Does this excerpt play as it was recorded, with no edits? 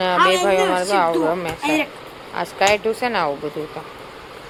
yes; 0 cuts

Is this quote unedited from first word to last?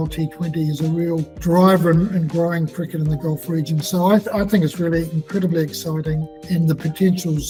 yes; 0 cuts

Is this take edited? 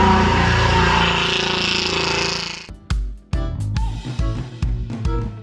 yes; 1 cut; at 2.6 s

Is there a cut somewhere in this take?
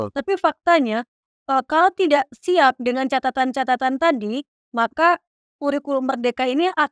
no; 0 cuts

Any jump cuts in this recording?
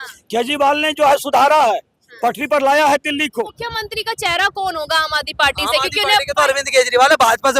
yes; 1 cut; at 3.6 s

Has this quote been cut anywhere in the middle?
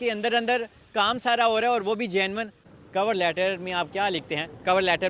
yes; 1 cut; at 2.6 s

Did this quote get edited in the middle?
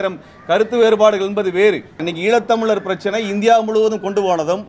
yes; 1 cut; at 2.0 s

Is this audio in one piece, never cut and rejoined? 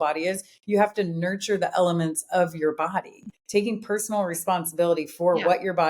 no; 1 cut; at 3.3 s

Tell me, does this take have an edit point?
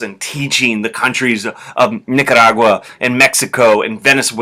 no; 0 cuts

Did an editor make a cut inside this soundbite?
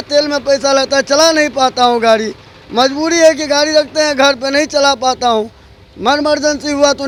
no; 0 cuts

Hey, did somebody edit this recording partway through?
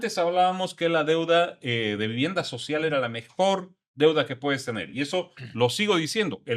no; 0 cuts

